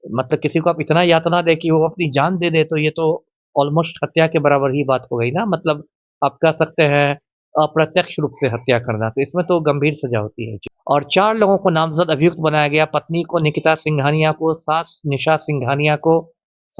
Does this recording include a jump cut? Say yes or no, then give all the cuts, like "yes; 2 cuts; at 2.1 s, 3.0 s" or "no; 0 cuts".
yes; 1 cut; at 10.8 s